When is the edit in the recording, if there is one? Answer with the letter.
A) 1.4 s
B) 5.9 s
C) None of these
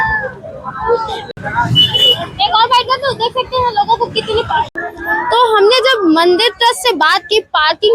C